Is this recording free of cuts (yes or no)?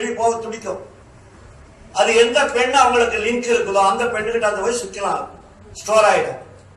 yes